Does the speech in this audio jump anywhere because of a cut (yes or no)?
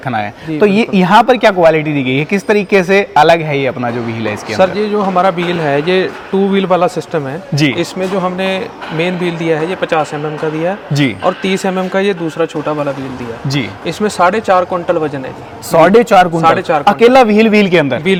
no